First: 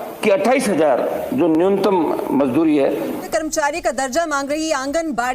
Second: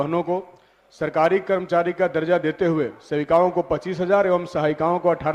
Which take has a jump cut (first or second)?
first